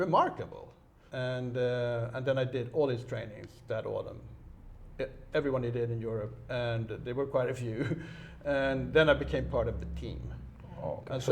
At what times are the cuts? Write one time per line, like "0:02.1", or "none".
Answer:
0:01.0